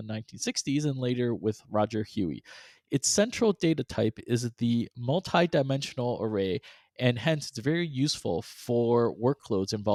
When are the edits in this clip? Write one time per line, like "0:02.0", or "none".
none